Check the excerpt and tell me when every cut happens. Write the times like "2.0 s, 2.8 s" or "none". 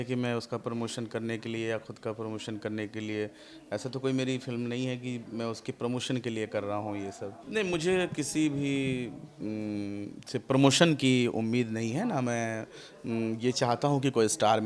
7.3 s